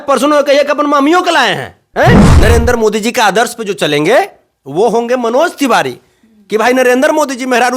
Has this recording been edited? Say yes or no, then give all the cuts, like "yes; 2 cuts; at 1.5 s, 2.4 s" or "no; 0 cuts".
yes; 1 cut; at 2.3 s